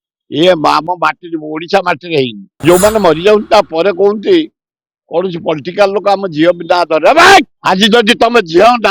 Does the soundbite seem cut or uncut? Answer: cut